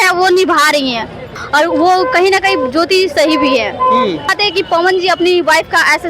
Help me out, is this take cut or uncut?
cut